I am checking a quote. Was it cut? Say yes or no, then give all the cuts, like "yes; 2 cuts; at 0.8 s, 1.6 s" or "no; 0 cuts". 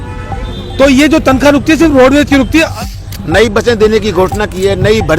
yes; 1 cut; at 2.7 s